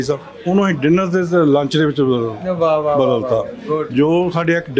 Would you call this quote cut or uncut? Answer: uncut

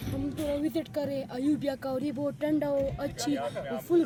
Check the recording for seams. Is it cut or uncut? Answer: uncut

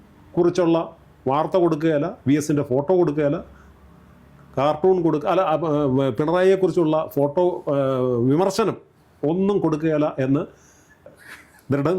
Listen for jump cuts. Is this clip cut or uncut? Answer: cut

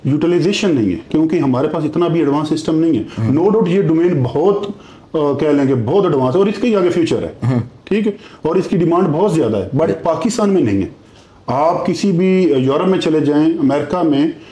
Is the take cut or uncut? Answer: uncut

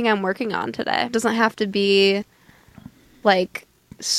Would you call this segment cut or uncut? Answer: cut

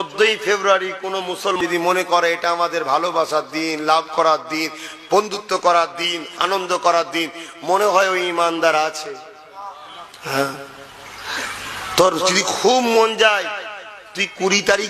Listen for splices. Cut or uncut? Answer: cut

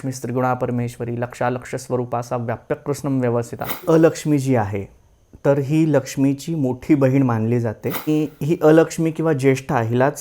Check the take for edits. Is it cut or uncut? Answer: cut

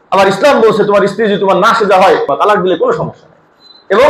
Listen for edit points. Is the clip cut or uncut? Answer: cut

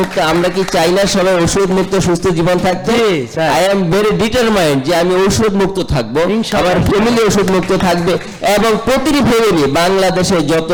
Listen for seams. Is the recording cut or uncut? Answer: uncut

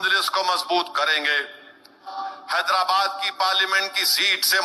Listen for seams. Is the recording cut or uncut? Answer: cut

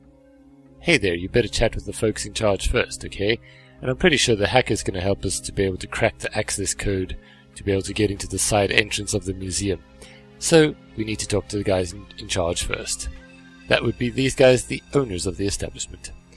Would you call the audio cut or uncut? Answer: cut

